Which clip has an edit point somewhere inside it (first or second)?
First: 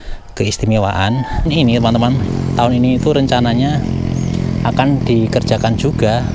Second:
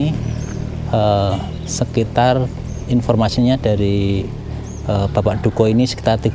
first